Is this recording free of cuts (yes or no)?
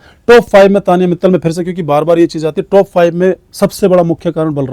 yes